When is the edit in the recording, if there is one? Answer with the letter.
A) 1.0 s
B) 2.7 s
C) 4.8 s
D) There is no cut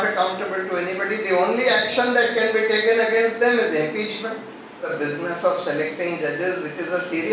C